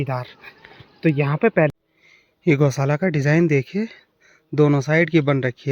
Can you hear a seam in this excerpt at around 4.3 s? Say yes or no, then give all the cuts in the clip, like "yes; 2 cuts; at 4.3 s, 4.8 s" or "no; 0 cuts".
no; 1 cut; at 1.7 s